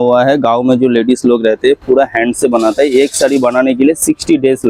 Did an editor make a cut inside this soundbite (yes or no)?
no